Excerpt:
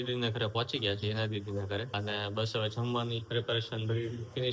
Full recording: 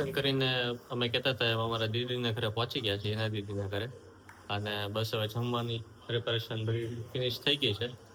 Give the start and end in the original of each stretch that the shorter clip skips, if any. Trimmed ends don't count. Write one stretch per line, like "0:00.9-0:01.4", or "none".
0:03.9-0:04.5
0:05.8-0:06.0

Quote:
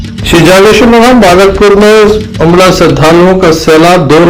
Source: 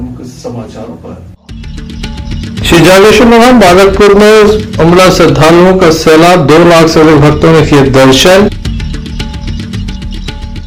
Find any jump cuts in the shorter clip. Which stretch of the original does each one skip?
none

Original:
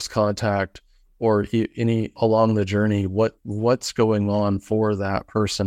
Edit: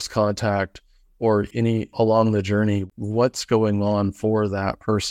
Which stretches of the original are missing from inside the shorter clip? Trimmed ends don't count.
0:01.5-0:01.7
0:03.1-0:03.3

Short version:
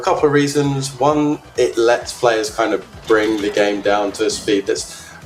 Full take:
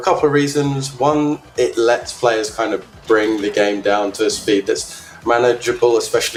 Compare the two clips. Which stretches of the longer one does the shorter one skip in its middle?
none

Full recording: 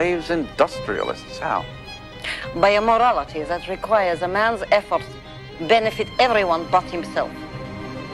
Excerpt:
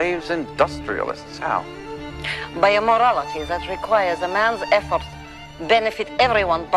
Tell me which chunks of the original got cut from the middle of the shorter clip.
none

